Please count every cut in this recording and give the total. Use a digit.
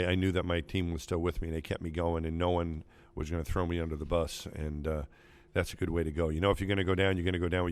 0